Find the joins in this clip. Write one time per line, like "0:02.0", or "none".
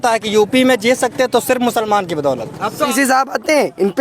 0:02.9